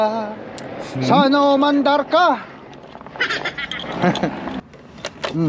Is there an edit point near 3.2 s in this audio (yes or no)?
no